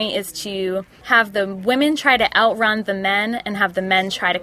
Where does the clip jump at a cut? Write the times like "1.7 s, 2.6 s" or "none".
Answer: 1.0 s